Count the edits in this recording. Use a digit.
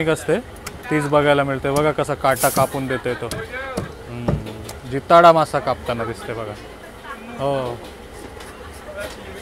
0